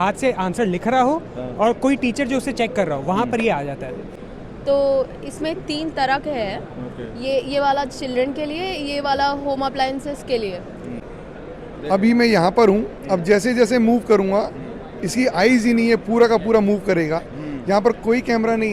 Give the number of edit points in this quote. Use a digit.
2